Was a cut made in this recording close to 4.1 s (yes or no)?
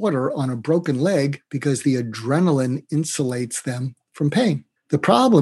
no